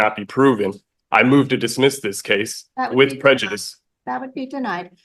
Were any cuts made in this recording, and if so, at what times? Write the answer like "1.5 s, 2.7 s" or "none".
none